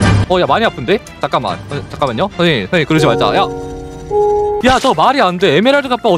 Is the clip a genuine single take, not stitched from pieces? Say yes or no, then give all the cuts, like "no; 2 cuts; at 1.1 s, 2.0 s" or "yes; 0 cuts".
no; 1 cut; at 4.6 s